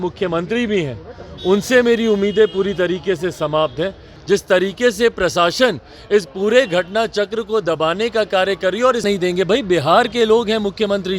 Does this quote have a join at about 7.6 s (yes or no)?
no